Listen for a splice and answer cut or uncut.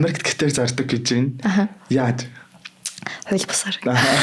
uncut